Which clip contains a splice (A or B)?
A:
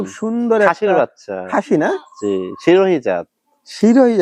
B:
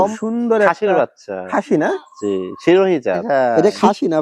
B